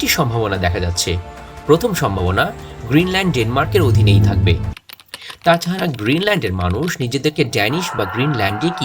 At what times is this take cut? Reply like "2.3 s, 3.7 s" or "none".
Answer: 4.8 s